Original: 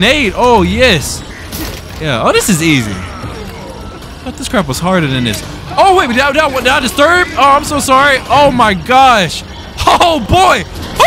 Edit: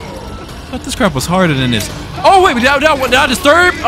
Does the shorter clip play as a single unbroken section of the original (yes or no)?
yes